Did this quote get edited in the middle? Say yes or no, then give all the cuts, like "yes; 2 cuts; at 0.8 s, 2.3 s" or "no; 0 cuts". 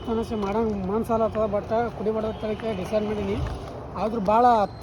no; 0 cuts